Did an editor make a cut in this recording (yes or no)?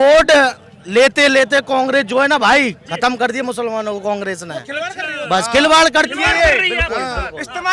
no